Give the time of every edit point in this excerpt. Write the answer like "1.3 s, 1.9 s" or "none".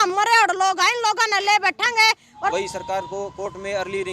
2.5 s